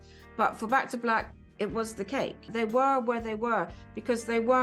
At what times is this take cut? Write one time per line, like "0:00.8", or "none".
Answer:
0:02.5